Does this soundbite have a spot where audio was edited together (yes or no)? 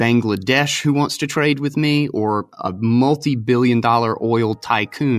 no